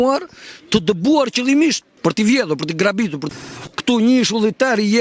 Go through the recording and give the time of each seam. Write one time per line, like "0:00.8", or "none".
0:01.9
0:03.2